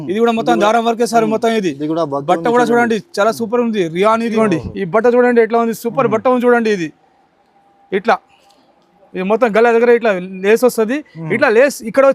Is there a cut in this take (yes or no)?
yes